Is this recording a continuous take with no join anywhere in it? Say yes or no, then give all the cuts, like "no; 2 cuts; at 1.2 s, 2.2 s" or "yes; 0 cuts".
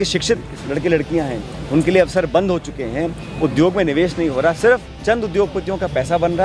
yes; 0 cuts